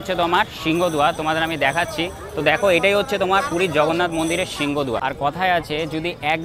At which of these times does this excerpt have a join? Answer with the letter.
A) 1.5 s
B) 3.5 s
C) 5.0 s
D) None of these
C